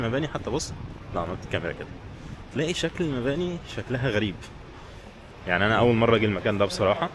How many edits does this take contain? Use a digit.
0